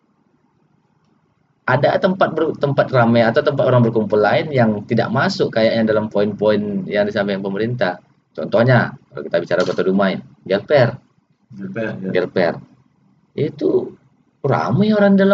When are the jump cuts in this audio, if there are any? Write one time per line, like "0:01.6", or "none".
none